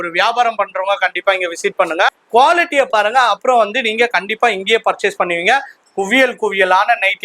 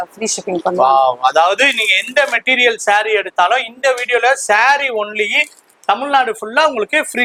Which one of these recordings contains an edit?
first; 2 cuts; at 2.2 s, 5.8 s

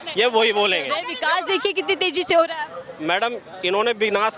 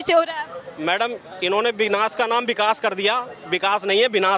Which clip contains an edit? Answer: first; 1 cut; at 1.0 s

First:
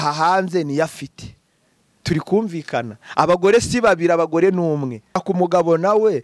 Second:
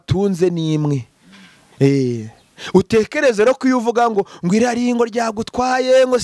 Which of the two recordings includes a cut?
first; 1 cut; at 5.1 s

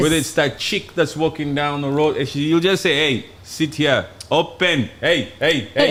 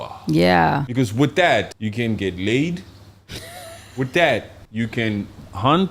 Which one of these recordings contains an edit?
second; 3 cuts; at 0.9 s, 1.7 s, 4.6 s

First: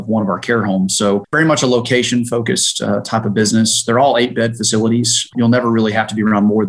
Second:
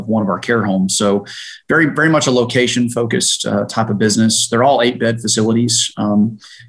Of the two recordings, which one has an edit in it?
first; 2 cuts; at 1.3 s, 5.3 s

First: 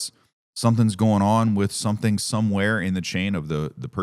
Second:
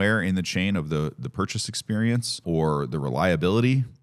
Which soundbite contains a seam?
second; 1 cut; at 2.4 s

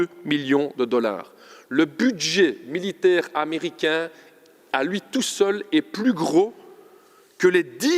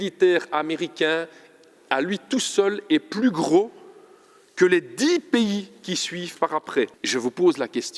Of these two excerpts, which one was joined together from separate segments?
second; 1 cut; at 6.9 s

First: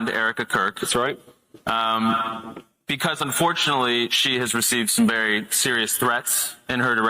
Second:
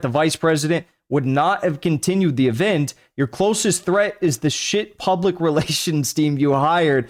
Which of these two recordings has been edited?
first; 1 cut; at 1.2 s

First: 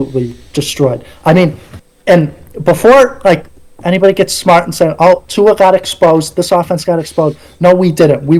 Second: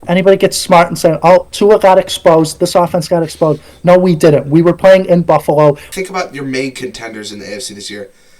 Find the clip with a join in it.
second; 1 cut; at 5.9 s

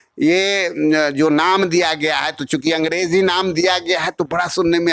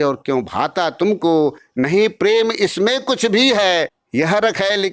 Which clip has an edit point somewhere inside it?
second; 1 cut; at 4.0 s

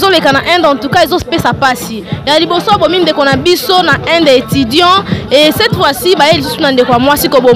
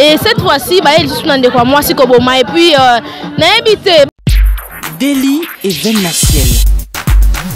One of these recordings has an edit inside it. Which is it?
second; 1 cut; at 4.1 s

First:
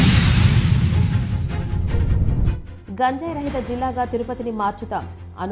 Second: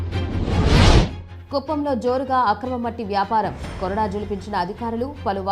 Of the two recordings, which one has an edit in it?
second; 1 cut; at 1.2 s

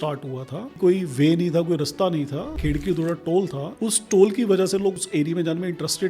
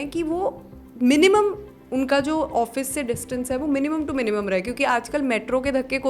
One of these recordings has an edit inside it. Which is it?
first; 4 cuts; at 0.8 s, 2.6 s, 3.6 s, 4.9 s

